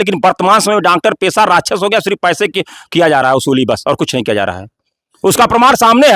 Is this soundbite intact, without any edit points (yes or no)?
yes